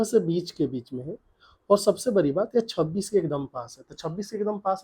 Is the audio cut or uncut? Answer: uncut